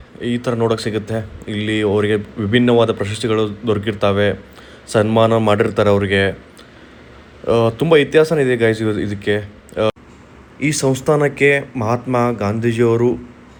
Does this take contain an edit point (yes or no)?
no